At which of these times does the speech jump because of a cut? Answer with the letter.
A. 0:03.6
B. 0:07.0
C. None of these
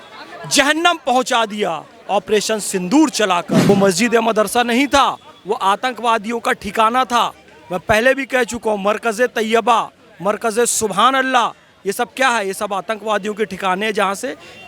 A